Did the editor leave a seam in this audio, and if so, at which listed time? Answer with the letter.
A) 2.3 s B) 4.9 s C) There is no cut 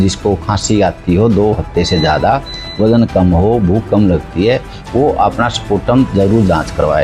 C